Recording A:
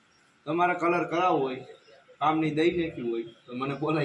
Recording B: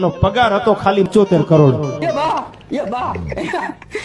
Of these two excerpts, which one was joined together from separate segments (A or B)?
B